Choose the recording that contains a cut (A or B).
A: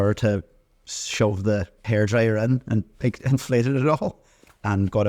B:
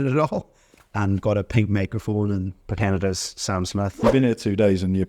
B